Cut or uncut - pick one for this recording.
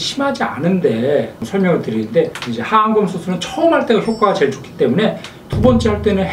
cut